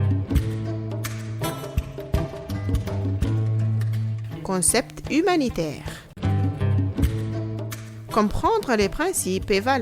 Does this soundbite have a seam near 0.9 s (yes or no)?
yes